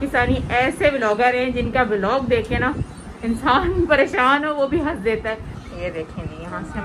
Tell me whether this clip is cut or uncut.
cut